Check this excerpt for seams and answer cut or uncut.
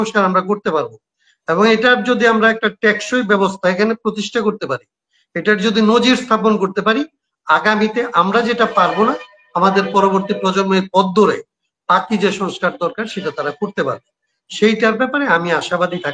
uncut